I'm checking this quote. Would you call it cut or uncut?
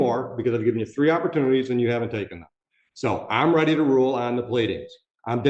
uncut